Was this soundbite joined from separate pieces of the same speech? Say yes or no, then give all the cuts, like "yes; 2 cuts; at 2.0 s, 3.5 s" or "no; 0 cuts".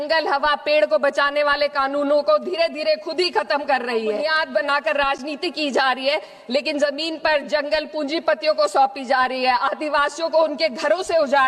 yes; 1 cut; at 4.2 s